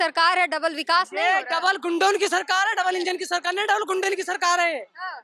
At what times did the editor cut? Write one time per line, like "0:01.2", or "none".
none